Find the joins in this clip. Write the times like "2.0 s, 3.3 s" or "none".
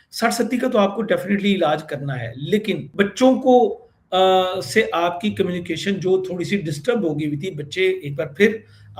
2.9 s